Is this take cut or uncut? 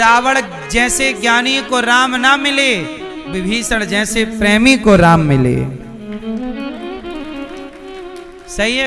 uncut